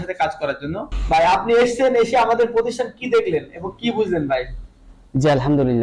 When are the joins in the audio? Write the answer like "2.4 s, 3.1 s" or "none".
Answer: 0.9 s